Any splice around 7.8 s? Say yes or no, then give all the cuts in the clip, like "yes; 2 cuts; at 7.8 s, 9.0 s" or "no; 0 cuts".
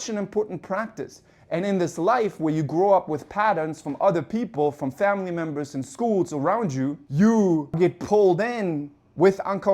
yes; 2 cuts; at 7.0 s, 7.8 s